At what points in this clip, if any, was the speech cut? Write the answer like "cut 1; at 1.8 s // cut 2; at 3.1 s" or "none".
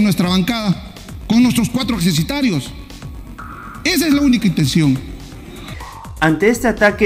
none